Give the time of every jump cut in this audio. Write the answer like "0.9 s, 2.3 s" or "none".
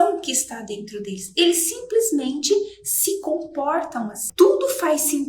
4.2 s